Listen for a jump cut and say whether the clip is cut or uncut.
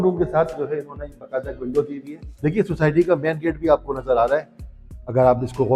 uncut